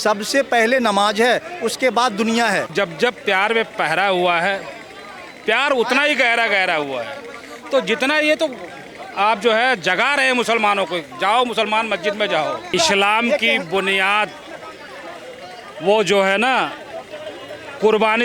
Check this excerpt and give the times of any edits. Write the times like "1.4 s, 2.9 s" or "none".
2.7 s, 12.7 s